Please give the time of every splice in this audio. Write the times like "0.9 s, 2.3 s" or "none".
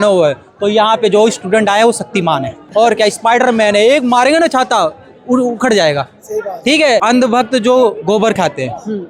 2.6 s, 7.0 s